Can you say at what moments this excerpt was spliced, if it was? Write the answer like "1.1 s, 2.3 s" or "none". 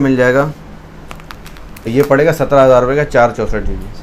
1.9 s

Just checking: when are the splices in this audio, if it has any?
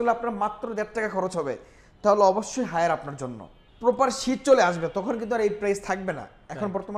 3.6 s

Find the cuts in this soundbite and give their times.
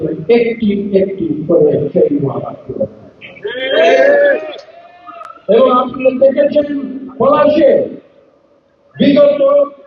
none

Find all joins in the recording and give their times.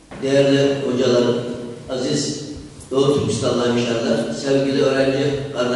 2.5 s

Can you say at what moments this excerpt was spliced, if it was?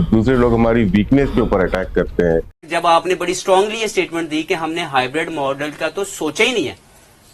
2.7 s

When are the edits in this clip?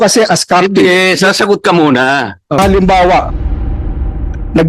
2.6 s

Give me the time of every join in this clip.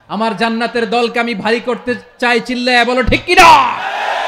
none

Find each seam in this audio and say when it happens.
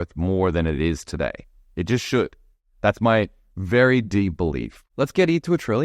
2.5 s, 4.8 s

